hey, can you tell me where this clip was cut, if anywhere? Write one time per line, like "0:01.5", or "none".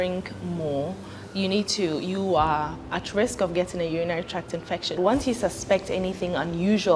0:05.0